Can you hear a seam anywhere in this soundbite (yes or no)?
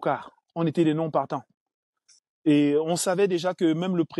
no